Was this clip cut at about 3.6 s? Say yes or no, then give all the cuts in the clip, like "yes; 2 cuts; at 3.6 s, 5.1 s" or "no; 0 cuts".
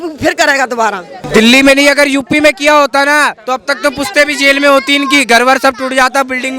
no; 1 cut; at 1.2 s